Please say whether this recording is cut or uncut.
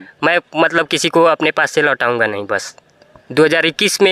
cut